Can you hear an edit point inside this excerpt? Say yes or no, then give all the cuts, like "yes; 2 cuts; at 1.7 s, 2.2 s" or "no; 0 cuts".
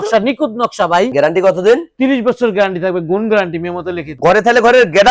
yes; 2 cuts; at 1.1 s, 4.1 s